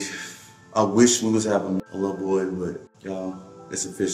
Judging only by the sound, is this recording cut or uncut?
cut